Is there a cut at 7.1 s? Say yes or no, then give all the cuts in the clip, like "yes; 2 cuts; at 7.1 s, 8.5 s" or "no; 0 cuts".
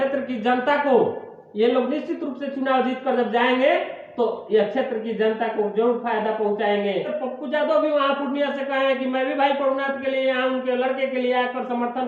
yes; 1 cut; at 7.1 s